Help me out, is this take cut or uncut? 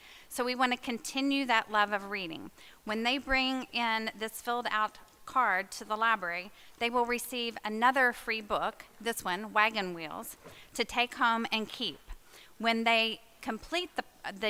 uncut